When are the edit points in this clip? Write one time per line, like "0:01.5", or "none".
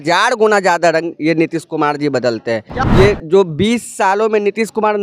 0:02.7